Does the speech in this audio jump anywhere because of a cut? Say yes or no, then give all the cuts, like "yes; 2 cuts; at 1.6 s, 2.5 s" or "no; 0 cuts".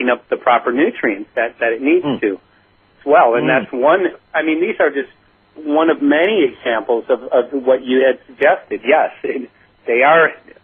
no; 0 cuts